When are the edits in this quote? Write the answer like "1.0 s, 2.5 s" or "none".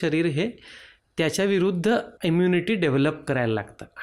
2.1 s